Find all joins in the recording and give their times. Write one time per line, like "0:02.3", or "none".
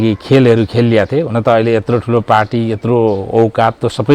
none